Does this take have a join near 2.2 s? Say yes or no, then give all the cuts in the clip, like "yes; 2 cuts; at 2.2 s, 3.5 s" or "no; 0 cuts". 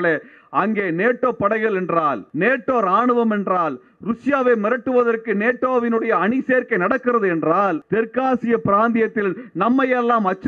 yes; 2 cuts; at 2.2 s, 7.8 s